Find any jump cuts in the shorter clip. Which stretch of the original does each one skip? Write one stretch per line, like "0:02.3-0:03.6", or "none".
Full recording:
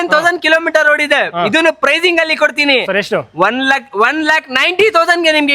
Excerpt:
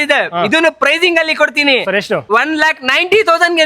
0:03.2-0:03.9